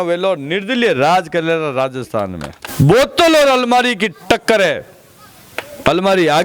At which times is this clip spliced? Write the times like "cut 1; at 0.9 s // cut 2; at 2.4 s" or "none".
cut 1; at 2.6 s